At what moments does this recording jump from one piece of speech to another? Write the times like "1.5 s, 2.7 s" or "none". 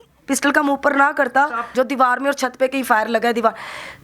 1.6 s